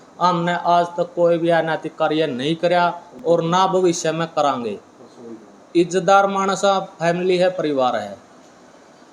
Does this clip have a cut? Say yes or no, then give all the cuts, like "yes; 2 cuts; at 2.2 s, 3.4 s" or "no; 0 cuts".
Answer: no; 0 cuts